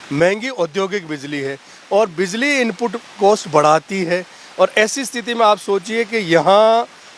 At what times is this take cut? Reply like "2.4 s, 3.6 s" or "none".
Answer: none